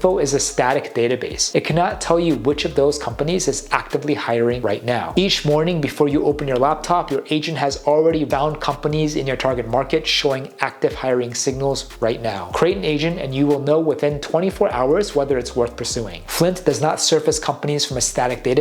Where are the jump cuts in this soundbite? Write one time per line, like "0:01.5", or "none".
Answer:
0:01.3
0:05.1
0:08.3
0:12.5
0:16.1